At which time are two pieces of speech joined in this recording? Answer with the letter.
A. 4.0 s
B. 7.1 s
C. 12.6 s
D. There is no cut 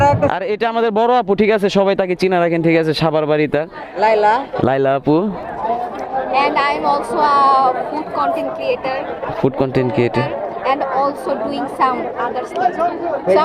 D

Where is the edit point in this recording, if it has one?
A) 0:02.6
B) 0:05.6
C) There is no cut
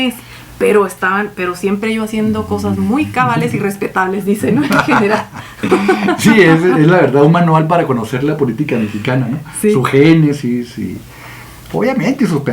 C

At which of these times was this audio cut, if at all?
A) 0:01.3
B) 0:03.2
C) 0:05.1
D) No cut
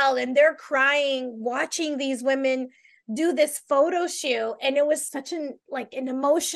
C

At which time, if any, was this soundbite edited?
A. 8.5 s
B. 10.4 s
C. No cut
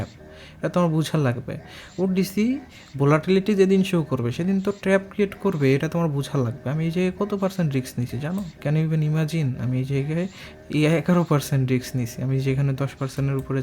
A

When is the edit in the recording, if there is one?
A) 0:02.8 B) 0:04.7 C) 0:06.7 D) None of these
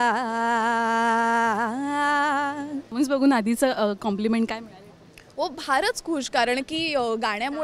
A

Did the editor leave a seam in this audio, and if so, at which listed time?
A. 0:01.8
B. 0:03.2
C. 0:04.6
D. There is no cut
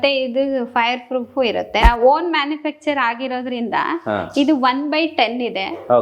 A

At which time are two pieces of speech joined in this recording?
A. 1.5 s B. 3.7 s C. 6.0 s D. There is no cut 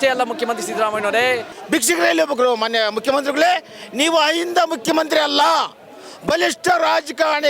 A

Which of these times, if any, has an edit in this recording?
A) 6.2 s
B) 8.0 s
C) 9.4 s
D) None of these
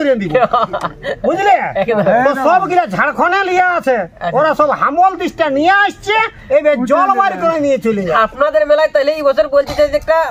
B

